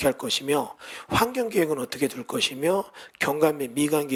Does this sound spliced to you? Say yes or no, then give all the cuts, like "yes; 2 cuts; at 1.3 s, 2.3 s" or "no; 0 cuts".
no; 0 cuts